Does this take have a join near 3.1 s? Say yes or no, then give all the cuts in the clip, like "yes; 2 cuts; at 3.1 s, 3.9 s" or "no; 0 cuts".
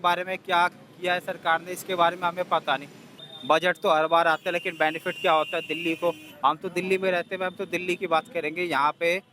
yes; 1 cut; at 3.1 s